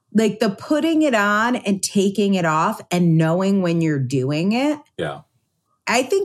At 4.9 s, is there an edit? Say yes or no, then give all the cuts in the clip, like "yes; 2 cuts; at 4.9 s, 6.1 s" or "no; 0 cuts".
no; 0 cuts